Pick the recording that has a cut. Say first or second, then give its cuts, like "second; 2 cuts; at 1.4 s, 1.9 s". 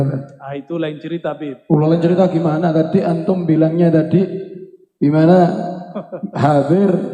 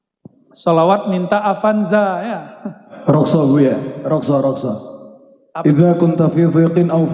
second; 1 cut; at 2.9 s